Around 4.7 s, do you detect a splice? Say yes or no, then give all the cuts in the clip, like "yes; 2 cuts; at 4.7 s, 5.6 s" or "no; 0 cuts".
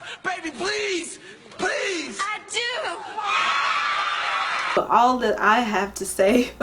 yes; 1 cut; at 4.7 s